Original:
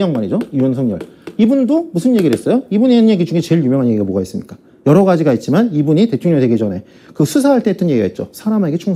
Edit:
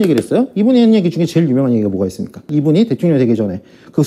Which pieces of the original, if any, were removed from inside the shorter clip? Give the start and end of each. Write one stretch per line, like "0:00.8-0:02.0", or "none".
0:04.6-0:05.7